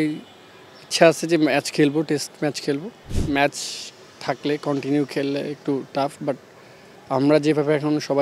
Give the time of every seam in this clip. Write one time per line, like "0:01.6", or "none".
0:03.1